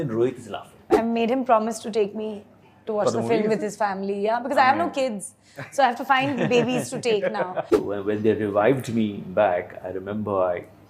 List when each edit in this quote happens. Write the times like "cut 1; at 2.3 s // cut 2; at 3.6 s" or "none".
cut 1; at 0.9 s // cut 2; at 7.7 s